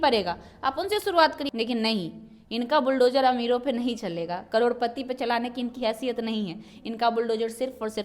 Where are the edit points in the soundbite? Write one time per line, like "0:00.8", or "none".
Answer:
0:01.4